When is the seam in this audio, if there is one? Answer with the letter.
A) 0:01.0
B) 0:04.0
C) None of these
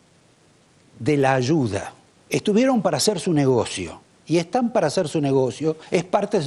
C